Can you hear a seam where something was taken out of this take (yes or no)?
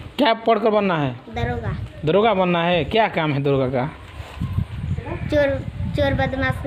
no